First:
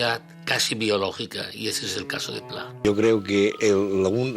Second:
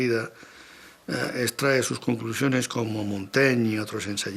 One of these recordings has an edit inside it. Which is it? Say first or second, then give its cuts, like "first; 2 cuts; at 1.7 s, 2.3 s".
first; 1 cut; at 2.8 s